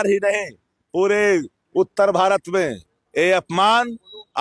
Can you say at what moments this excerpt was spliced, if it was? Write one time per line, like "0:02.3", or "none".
none